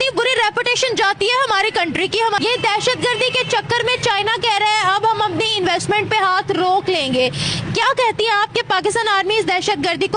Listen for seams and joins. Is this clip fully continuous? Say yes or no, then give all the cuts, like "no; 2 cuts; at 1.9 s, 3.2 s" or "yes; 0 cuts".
yes; 0 cuts